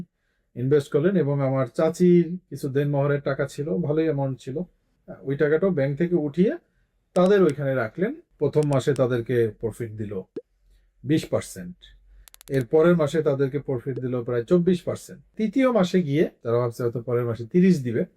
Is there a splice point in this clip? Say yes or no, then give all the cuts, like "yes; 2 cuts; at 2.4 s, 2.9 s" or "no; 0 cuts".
yes; 3 cuts; at 8.2 s, 15.3 s, 16.4 s